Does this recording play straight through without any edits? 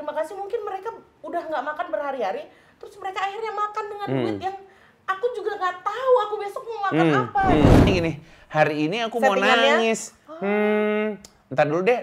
no; 1 cut; at 7.9 s

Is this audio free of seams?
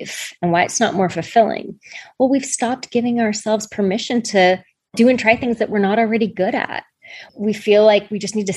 yes; 0 cuts

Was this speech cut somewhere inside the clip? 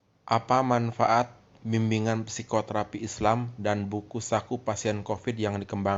no; 0 cuts

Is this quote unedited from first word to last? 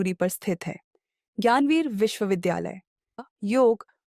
no; 1 cut; at 3.2 s

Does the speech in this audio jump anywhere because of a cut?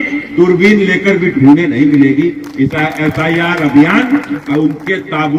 no; 0 cuts

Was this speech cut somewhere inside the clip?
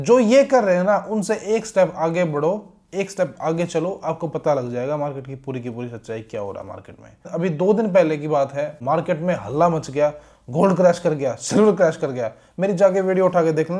no; 0 cuts

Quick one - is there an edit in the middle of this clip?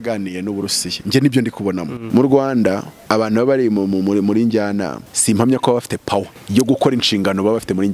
yes; 4 cuts; at 2.0 s, 2.9 s, 5.0 s, 6.4 s

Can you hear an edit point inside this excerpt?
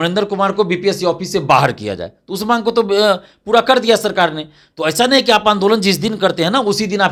no; 0 cuts

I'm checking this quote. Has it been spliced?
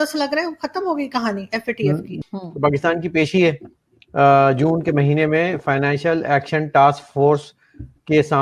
yes; 1 cut; at 2.1 s

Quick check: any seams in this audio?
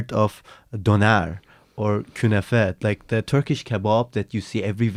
no; 0 cuts

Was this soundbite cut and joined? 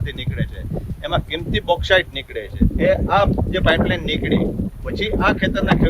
yes; 1 cut; at 2.7 s

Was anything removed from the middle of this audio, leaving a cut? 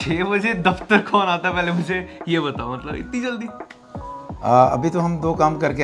no; 0 cuts

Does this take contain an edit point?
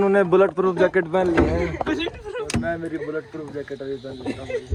no; 0 cuts

